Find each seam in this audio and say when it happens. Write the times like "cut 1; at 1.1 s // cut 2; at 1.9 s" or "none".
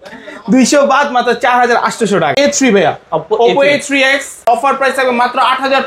cut 1; at 2.3 s // cut 2; at 4.5 s